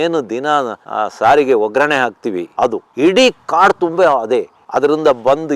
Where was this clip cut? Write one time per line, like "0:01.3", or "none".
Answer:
0:04.6